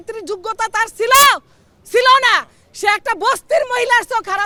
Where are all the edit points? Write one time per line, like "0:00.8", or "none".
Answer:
none